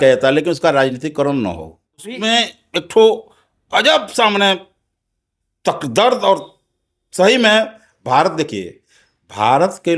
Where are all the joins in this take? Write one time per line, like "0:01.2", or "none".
0:02.2